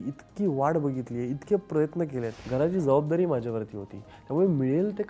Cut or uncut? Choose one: cut